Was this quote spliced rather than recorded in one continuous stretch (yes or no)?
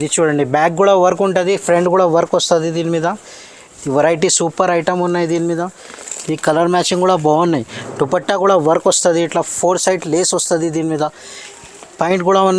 no